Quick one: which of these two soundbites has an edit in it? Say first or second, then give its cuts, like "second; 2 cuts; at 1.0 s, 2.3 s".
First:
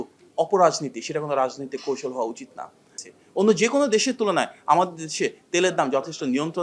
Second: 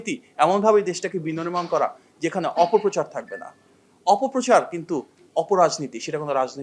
first; 1 cut; at 2.8 s